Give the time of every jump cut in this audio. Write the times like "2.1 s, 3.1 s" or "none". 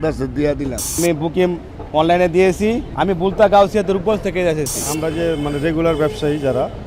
1.0 s, 2.9 s, 4.8 s